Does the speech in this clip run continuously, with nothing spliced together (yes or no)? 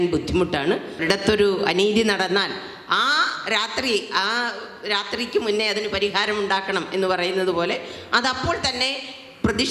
no